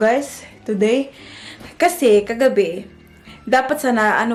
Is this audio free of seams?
yes; 0 cuts

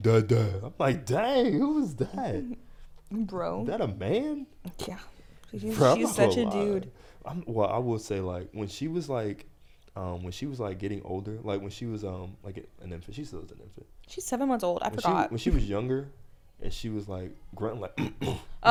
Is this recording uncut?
yes; 0 cuts

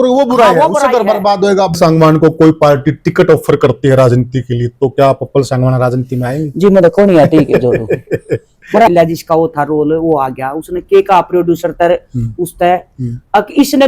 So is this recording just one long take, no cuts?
no; 2 cuts; at 1.7 s, 8.9 s

